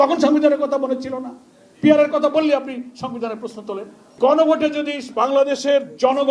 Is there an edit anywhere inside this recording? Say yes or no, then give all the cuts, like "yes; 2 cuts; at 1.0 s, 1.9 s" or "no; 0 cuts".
yes; 1 cut; at 4.2 s